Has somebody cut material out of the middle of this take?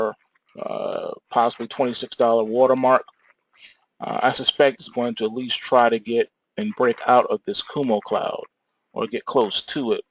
no; 0 cuts

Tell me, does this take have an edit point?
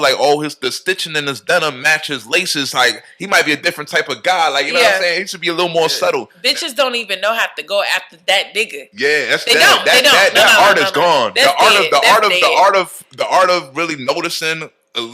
yes; 1 cut; at 6.3 s

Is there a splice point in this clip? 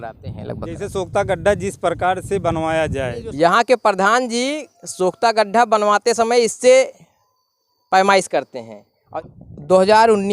yes; 2 cuts; at 3.2 s, 9.0 s

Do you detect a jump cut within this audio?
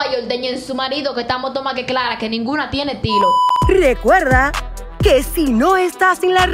yes; 1 cut; at 3.5 s

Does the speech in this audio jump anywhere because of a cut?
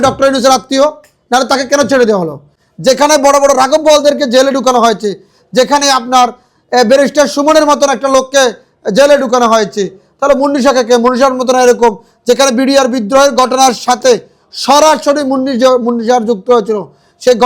no; 0 cuts

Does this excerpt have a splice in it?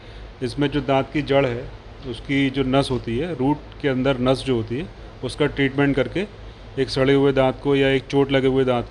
no; 0 cuts

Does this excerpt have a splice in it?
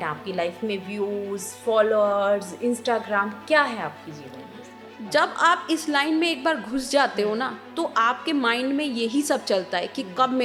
no; 0 cuts

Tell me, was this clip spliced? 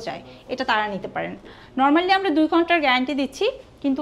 no; 0 cuts

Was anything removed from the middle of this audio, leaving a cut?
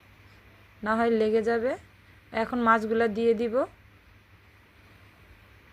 yes; 1 cut; at 2.6 s

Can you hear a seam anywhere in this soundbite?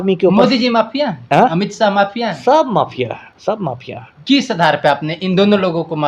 no; 0 cuts

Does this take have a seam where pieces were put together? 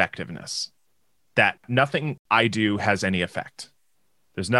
yes; 1 cut; at 1.9 s

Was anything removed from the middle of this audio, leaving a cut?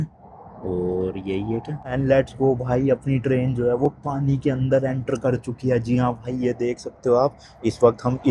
yes; 1 cut; at 1.8 s

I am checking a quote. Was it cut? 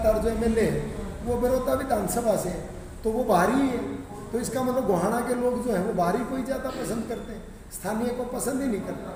no; 0 cuts

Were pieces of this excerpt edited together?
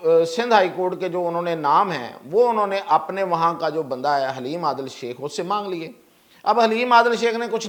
no; 0 cuts

